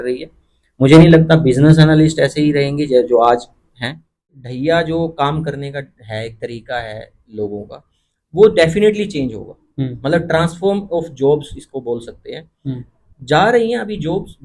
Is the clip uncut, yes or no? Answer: no